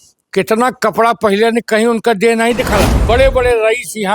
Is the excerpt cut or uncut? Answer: cut